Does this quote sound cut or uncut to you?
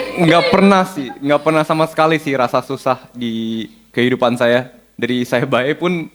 uncut